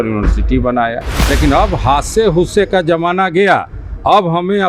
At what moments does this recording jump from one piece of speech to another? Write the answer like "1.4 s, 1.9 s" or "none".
1.2 s